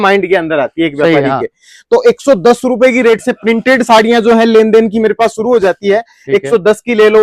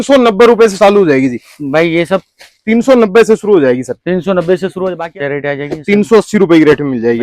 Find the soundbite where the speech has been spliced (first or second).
second